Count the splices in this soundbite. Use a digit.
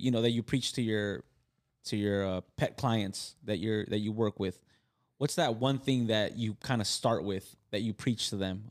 0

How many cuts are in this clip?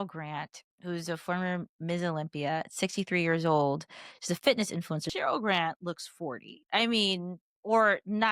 1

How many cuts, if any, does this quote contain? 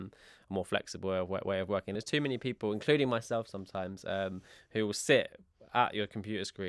1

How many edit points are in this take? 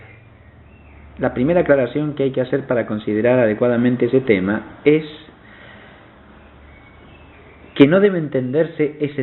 1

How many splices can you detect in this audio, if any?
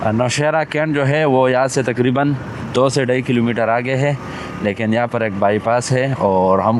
0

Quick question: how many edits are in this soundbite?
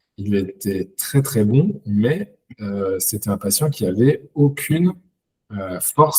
0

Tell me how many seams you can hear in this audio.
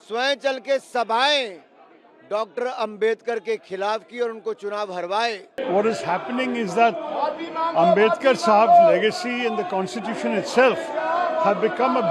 1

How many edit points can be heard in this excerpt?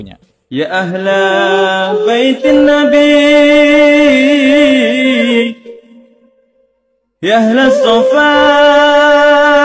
0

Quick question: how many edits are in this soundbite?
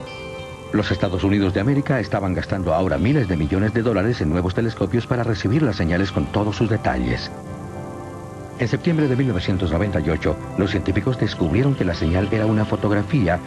0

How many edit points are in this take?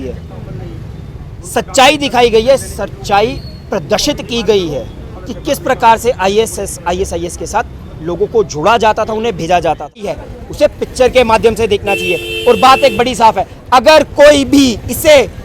1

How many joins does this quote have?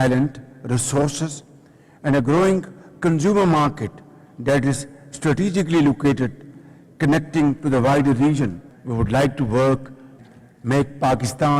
1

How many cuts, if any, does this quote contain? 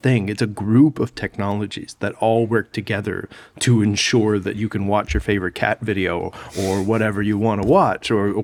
0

